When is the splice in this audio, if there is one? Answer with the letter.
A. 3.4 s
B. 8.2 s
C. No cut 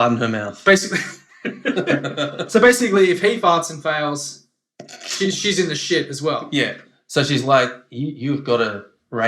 A